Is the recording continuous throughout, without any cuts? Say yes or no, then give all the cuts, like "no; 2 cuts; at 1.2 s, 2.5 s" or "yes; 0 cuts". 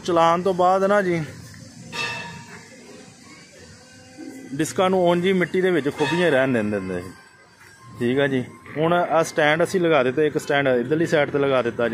yes; 0 cuts